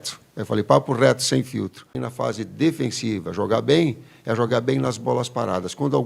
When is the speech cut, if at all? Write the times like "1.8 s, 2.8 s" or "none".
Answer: 2.1 s